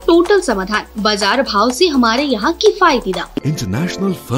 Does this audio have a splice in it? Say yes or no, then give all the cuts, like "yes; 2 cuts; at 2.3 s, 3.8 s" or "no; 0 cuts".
yes; 1 cut; at 3.4 s